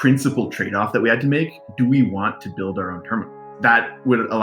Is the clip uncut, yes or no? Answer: no